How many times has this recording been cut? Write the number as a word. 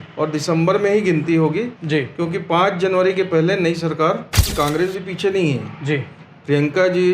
one